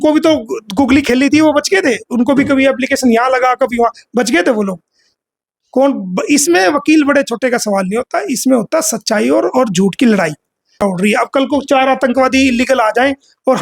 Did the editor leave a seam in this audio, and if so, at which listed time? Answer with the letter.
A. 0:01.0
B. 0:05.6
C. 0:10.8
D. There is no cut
C